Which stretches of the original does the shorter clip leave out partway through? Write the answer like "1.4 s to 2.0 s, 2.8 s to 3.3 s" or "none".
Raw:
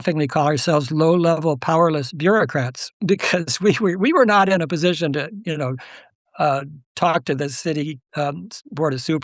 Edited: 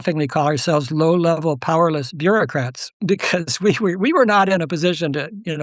none